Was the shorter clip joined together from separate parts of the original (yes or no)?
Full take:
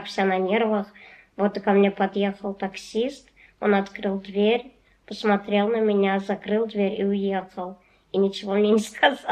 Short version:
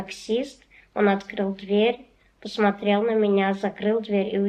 no